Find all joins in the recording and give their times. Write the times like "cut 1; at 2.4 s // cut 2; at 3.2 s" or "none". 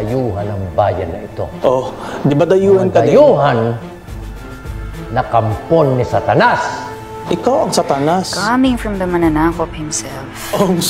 none